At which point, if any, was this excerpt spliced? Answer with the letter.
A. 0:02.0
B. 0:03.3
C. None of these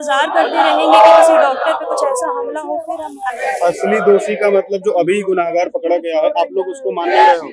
B